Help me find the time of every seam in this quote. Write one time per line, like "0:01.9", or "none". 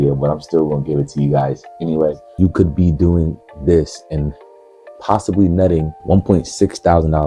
0:02.3